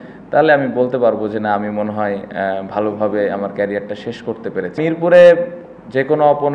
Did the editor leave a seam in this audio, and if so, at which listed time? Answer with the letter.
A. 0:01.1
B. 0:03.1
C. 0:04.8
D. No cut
C